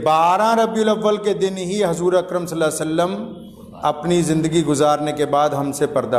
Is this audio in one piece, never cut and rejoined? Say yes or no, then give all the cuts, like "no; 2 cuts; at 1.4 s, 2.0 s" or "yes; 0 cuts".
yes; 0 cuts